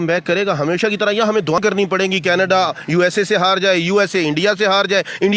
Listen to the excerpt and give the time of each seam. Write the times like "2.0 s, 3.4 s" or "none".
1.6 s